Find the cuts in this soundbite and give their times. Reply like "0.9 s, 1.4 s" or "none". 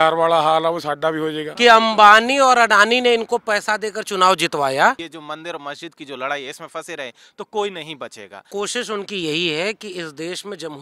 1.4 s, 5.1 s, 8.4 s